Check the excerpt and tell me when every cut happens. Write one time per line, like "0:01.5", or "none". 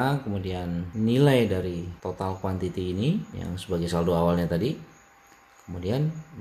0:00.9
0:01.9
0:03.3